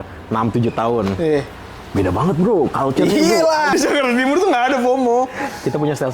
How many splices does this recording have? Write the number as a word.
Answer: one